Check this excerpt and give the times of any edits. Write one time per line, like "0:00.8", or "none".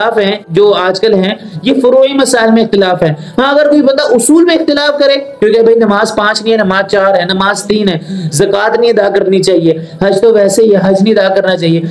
none